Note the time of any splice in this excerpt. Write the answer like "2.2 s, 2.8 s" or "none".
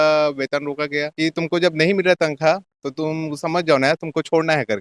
1.2 s